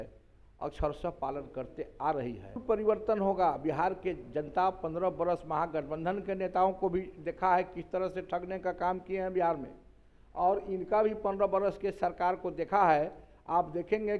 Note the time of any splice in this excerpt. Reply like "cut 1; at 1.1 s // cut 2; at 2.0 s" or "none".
cut 1; at 2.6 s